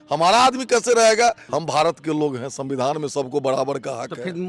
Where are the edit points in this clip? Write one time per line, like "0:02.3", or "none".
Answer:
0:01.5